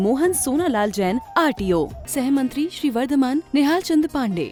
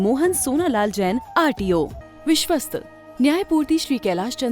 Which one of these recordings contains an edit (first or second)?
second